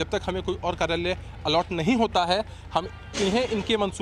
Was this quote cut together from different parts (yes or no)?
no